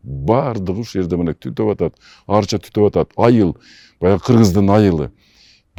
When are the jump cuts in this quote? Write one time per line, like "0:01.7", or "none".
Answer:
none